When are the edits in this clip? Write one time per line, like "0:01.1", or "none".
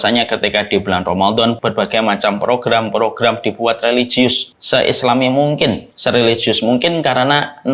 0:01.6
0:04.5
0:05.9